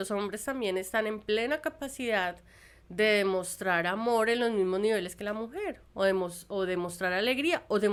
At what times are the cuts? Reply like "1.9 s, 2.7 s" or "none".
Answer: none

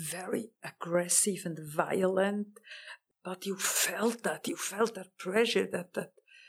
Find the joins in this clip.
2.9 s

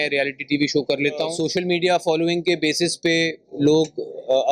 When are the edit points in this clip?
1.4 s

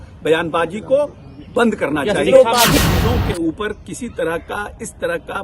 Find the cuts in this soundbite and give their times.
2.8 s

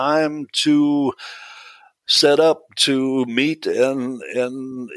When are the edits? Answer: none

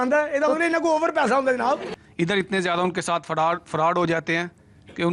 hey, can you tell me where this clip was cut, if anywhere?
1.9 s

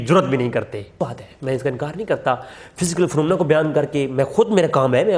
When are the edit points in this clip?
1.0 s

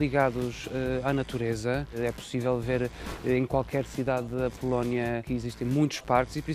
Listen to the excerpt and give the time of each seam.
2.0 s, 5.2 s

